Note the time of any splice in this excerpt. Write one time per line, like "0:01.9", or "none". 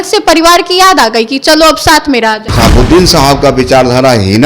0:02.4